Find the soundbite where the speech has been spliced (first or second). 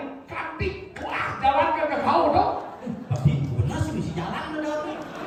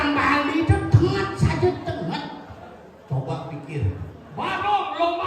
second